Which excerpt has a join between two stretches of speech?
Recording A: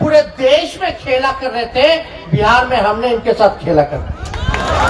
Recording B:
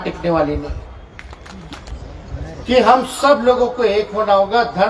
B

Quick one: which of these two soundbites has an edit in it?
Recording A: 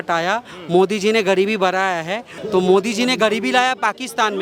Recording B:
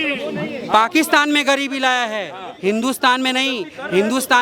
A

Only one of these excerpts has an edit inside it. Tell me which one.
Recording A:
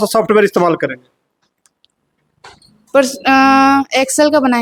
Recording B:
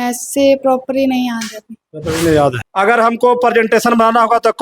B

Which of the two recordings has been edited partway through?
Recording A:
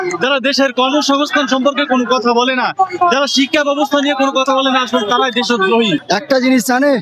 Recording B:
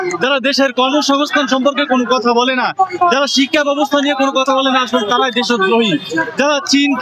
A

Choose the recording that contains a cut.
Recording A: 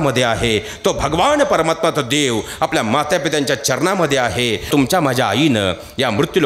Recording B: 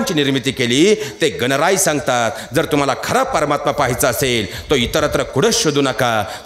A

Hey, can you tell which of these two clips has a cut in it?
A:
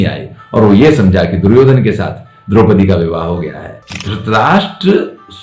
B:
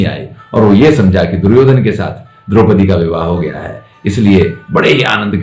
A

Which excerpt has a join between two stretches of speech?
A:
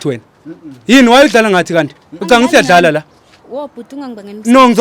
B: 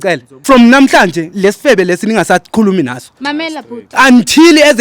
B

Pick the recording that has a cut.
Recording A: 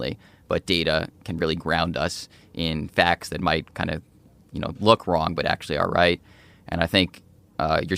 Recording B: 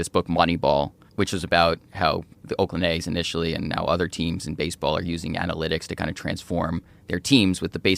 B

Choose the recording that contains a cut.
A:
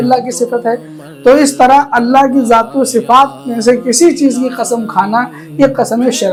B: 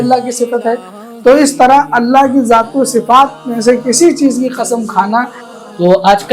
B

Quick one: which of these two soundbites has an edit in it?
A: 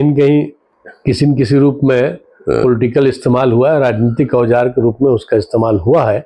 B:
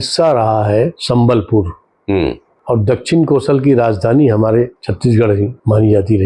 B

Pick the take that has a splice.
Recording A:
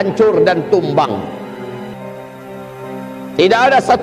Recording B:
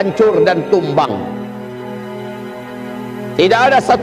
B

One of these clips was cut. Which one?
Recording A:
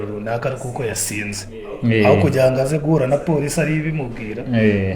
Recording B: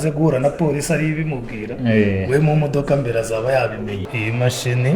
B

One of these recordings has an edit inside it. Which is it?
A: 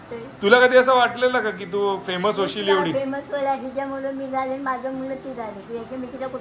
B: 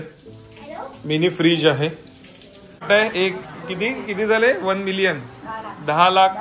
B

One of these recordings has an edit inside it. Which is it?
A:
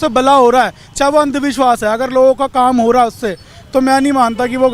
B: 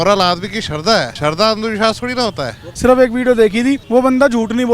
B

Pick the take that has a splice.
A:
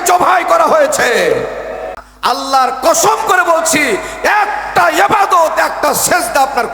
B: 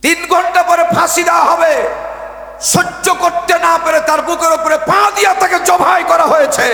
A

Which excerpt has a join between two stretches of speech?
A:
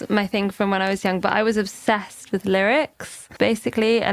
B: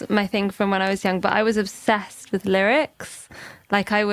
A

